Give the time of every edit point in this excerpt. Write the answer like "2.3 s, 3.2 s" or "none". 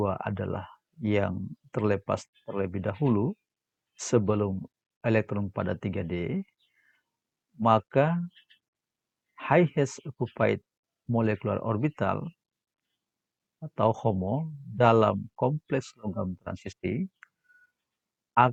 none